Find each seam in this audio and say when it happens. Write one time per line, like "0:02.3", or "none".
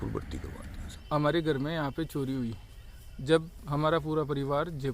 0:01.1